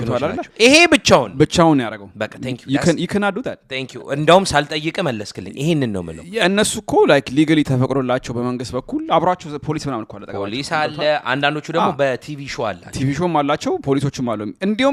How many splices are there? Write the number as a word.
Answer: zero